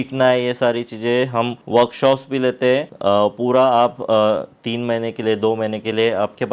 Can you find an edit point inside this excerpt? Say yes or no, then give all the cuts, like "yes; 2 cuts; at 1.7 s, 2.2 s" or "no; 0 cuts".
yes; 2 cuts; at 1.6 s, 2.9 s